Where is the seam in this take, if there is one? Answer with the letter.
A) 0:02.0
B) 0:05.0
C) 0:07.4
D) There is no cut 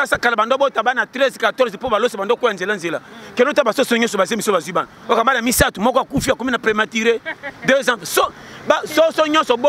D